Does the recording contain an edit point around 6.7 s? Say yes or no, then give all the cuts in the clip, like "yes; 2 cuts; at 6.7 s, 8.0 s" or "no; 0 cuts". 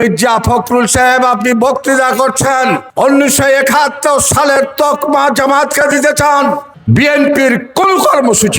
yes; 1 cut; at 6.7 s